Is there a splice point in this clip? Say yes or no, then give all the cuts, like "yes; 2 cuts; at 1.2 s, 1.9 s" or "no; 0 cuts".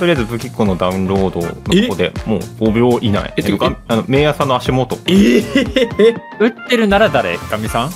yes; 5 cuts; at 1.6 s, 2.5 s, 3.3 s, 5.0 s, 6.3 s